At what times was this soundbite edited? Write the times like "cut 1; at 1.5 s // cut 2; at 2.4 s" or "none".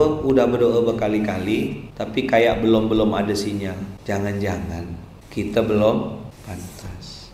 cut 1; at 6.3 s